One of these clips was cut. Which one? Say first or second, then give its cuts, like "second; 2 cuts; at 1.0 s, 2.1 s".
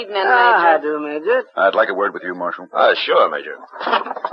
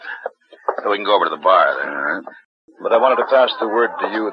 second; 1 cut; at 2.5 s